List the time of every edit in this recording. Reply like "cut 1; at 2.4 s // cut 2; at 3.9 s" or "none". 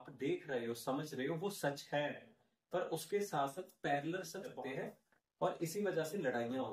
cut 1; at 4.5 s